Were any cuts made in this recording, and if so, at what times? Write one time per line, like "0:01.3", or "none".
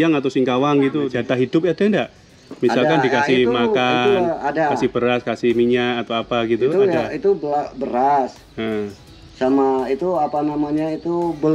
0:01.1